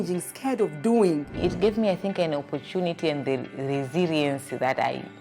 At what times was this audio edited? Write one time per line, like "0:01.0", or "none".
0:01.3